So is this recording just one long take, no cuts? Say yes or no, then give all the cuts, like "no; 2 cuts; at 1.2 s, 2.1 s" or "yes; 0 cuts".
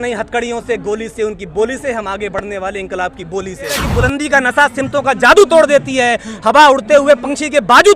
no; 1 cut; at 3.9 s